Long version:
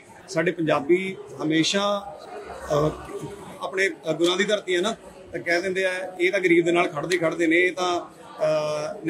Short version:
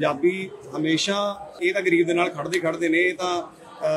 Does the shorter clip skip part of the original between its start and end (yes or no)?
yes